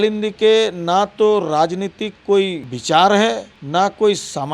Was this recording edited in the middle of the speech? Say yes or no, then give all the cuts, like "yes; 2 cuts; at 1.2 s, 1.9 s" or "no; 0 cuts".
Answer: yes; 2 cuts; at 2.7 s, 3.5 s